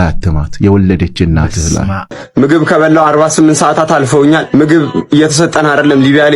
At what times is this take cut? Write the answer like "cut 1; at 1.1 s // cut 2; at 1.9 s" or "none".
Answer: cut 1; at 2.2 s